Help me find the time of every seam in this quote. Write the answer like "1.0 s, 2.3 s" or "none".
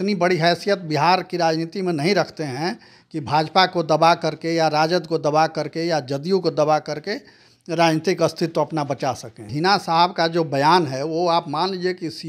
9.5 s